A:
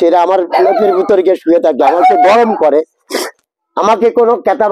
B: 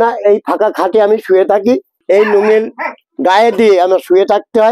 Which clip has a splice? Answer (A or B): B